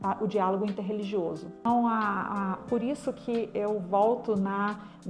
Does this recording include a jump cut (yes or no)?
yes